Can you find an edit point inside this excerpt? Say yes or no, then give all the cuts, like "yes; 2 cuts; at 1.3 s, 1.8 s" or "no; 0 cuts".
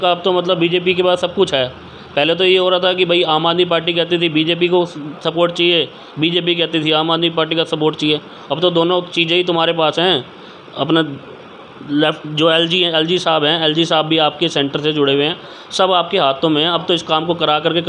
no; 0 cuts